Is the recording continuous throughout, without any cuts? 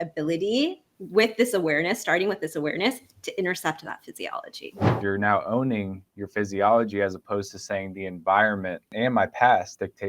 no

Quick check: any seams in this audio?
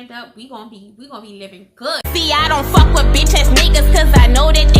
yes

